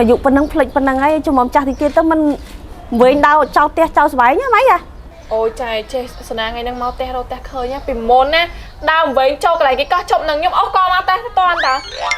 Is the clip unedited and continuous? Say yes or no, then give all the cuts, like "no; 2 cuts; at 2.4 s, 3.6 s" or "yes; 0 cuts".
yes; 0 cuts